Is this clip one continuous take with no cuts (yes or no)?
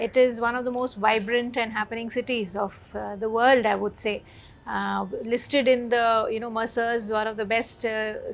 yes